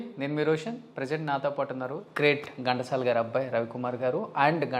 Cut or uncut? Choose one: cut